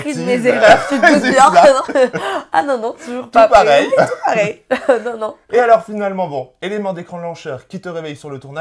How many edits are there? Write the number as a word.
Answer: zero